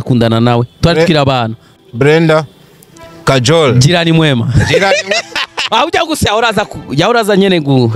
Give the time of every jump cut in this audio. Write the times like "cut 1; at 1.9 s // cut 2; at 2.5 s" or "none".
none